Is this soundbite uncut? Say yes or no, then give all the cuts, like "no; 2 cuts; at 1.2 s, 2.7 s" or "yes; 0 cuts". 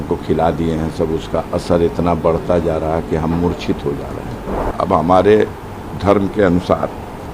no; 1 cut; at 4.6 s